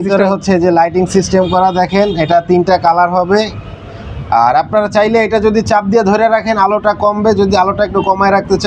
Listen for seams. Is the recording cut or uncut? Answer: uncut